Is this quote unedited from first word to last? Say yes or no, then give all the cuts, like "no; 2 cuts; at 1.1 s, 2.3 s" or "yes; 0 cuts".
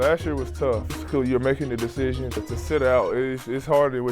no; 2 cuts; at 0.9 s, 2.4 s